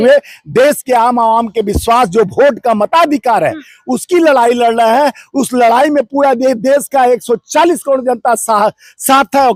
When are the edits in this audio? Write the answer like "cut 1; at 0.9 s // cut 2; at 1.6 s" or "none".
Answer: none